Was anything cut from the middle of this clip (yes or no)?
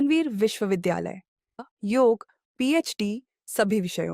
yes